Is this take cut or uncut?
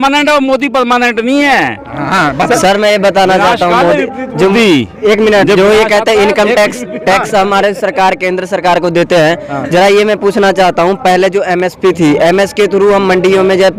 uncut